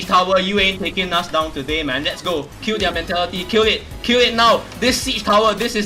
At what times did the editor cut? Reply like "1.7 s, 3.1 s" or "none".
2.5 s

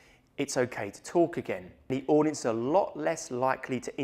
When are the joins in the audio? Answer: 1.7 s

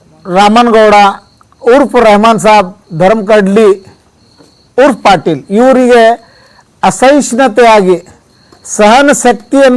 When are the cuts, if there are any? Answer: none

